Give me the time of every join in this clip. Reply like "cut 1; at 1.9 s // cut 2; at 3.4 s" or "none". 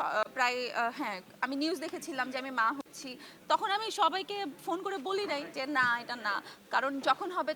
none